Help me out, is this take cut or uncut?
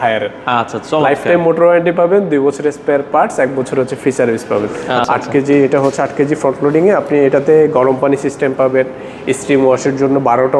cut